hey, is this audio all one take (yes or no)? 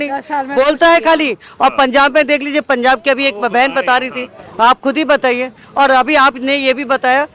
yes